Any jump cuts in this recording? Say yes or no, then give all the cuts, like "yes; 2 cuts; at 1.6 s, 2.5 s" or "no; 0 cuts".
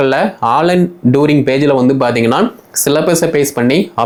no; 0 cuts